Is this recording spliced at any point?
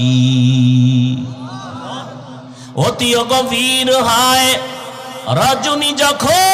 yes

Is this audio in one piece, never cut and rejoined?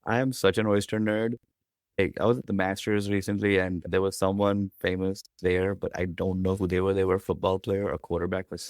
no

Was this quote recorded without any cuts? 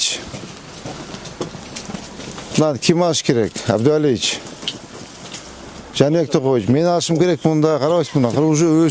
yes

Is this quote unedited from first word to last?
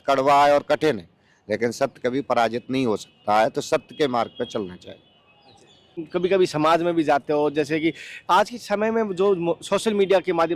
yes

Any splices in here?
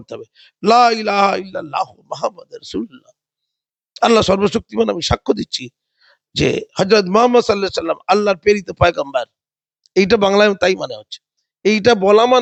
no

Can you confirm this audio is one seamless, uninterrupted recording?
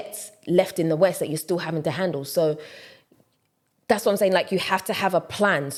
yes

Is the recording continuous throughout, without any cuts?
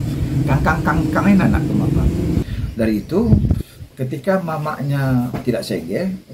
no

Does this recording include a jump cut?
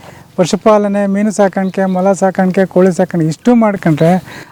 no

